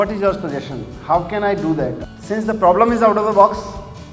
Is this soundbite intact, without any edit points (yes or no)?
no